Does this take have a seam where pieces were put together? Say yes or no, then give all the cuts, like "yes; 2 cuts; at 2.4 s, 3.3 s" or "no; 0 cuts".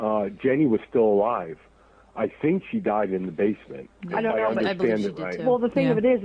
no; 0 cuts